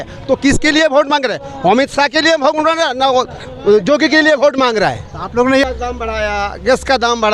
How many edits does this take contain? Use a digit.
1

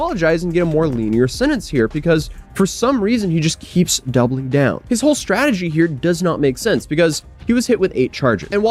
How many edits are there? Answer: 0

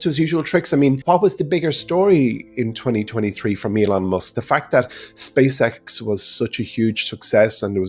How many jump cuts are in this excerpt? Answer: 1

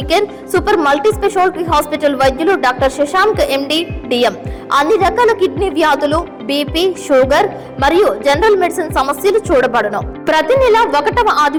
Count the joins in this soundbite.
0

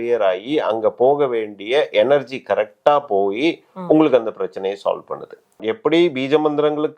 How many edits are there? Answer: 0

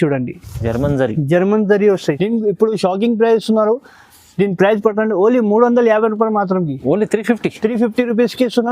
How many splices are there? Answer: 1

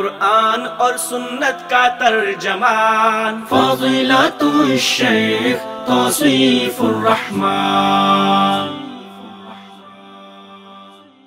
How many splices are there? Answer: 0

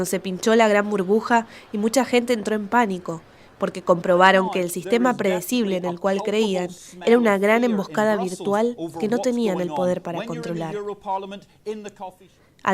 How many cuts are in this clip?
1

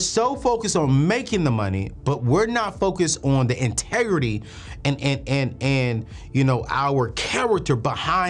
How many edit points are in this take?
0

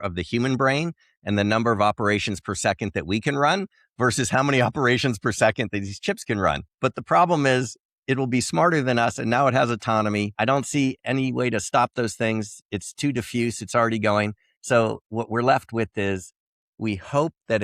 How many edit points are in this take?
2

